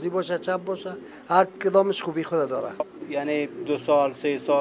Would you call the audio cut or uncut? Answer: cut